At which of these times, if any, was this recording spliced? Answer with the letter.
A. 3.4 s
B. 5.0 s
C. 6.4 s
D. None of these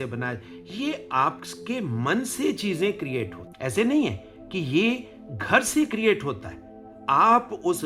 A